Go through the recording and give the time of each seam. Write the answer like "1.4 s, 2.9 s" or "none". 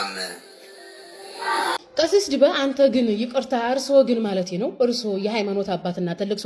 1.9 s